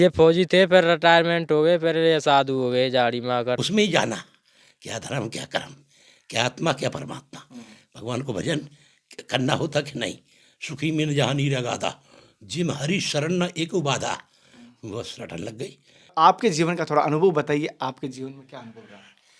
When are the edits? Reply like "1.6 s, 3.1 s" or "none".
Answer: 3.6 s, 16.1 s